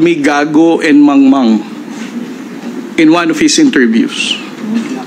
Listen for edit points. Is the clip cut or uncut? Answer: uncut